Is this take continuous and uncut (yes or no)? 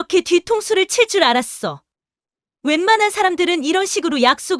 yes